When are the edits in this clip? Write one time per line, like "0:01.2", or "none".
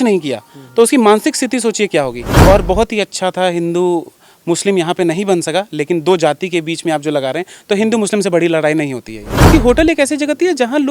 0:02.2
0:09.5